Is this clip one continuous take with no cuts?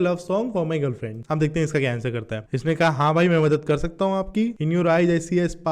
no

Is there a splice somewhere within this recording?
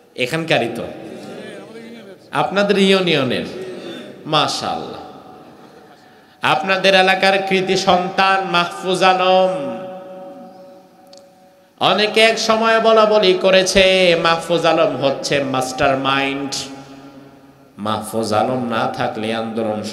no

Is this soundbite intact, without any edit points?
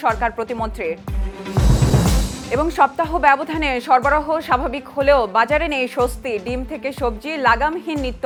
yes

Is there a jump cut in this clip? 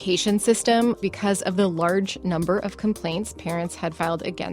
yes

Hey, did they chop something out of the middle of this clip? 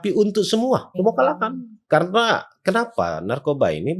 yes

